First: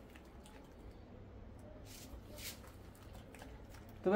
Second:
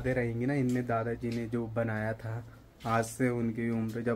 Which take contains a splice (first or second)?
first